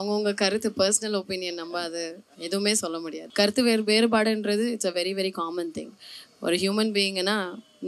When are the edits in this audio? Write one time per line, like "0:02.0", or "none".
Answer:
0:03.2

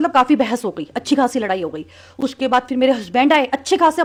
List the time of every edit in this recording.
none

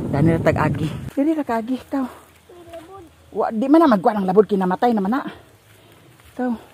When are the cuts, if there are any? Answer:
0:01.0

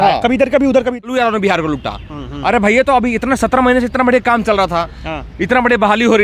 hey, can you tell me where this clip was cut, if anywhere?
0:01.0

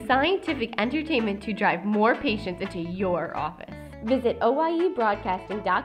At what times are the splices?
none

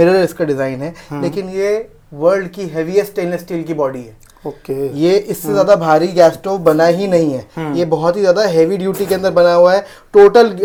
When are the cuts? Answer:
none

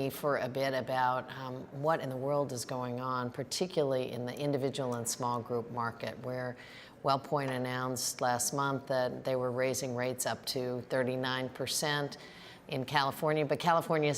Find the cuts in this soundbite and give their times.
0:06.2

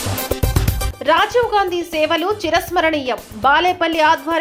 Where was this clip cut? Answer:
none

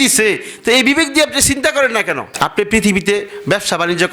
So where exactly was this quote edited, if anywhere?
0:02.3

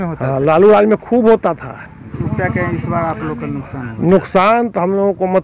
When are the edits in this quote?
0:02.1

